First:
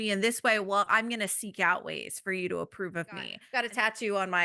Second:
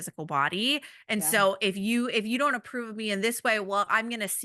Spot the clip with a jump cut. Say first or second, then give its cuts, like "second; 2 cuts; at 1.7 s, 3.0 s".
first; 1 cut; at 3.4 s